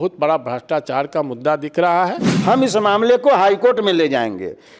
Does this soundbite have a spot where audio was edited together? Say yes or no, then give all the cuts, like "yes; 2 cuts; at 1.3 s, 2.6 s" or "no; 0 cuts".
yes; 1 cut; at 2.3 s